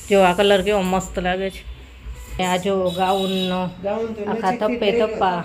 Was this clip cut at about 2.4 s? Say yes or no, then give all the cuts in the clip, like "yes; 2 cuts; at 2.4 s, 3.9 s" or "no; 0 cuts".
yes; 1 cut; at 2.4 s